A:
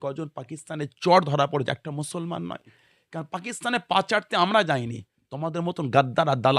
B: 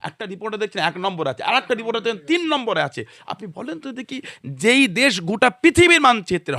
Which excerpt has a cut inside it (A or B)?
A